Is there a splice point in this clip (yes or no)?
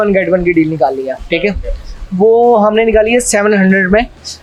no